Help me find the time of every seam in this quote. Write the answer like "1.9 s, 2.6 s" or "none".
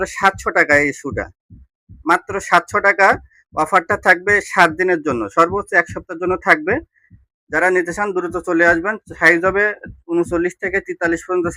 none